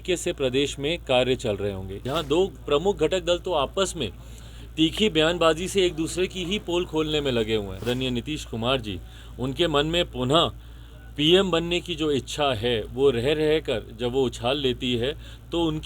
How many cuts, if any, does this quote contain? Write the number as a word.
two